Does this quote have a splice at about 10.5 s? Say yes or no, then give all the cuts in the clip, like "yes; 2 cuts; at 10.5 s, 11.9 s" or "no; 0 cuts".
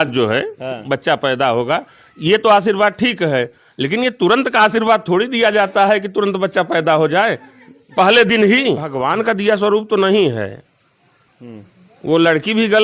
no; 1 cut; at 8.9 s